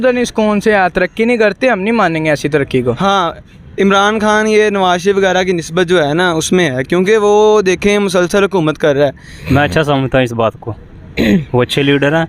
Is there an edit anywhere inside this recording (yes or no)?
yes